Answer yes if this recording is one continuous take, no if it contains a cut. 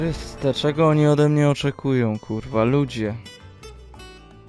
yes